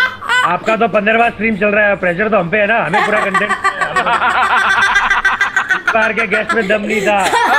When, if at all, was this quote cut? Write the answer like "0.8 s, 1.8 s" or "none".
none

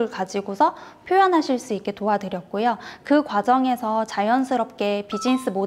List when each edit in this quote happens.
none

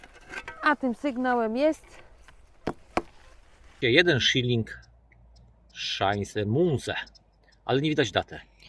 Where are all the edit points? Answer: 3.7 s

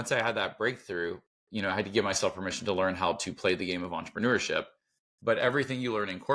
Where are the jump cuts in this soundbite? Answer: none

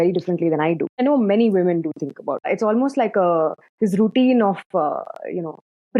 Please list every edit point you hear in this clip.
1.0 s, 2.5 s

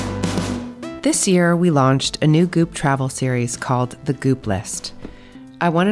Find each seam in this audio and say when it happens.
0.9 s

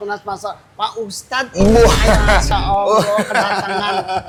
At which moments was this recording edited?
none

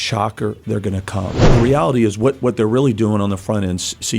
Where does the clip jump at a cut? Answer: 1.5 s

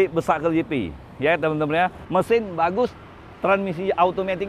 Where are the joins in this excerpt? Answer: 2.0 s

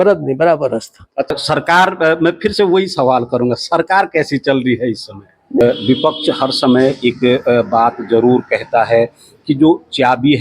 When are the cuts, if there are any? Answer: 1.3 s, 5.6 s

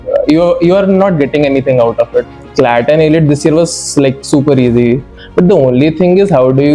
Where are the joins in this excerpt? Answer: 2.4 s, 5.2 s

